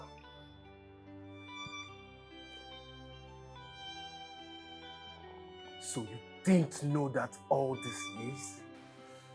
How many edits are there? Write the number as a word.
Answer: zero